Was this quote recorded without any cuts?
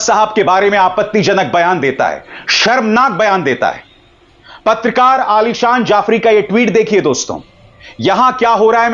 yes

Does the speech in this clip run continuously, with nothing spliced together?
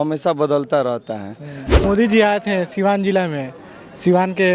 no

